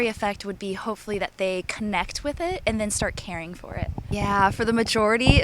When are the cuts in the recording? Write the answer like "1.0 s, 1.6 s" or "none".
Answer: 4.1 s